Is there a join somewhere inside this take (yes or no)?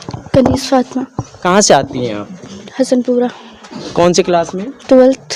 no